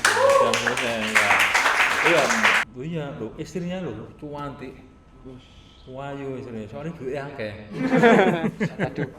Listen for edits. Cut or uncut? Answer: cut